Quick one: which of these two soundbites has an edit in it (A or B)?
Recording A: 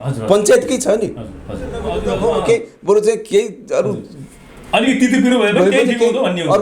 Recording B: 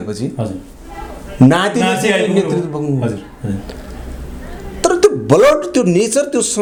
A